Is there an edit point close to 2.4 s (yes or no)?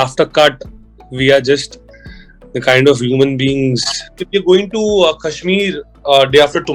no